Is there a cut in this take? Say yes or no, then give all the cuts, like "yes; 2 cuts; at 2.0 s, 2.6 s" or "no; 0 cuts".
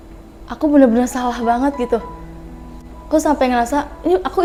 no; 0 cuts